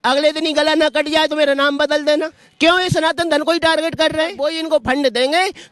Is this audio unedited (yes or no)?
no